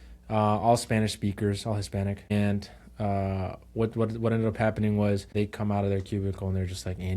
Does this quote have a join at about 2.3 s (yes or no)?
yes